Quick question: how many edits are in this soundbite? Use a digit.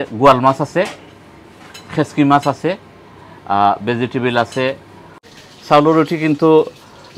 1